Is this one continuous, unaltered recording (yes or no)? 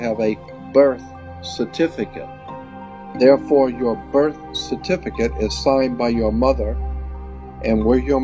no